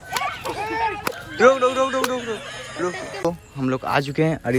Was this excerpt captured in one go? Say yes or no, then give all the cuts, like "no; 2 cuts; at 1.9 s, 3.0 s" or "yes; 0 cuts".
no; 1 cut; at 3.2 s